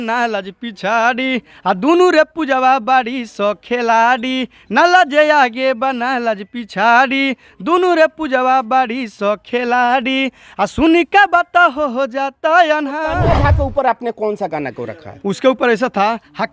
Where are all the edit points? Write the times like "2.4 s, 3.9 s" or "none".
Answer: 13.2 s